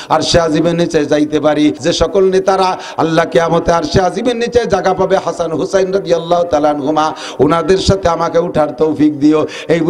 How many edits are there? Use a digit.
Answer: 1